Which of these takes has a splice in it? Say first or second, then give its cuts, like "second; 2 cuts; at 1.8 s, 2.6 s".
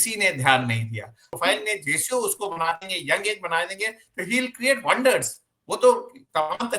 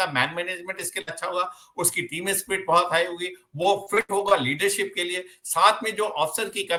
first; 1 cut; at 1.3 s